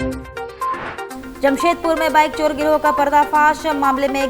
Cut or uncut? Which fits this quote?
cut